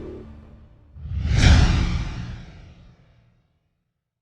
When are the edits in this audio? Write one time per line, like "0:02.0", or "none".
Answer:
none